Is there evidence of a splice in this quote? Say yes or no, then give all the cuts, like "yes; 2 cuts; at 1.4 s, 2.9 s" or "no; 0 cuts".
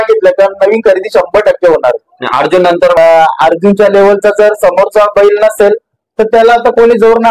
yes; 1 cut; at 3.0 s